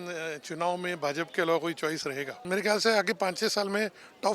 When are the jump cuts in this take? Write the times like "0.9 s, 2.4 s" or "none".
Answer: 2.4 s